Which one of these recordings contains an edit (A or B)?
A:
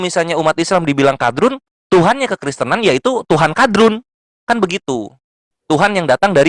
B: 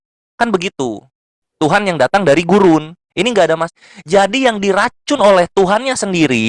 B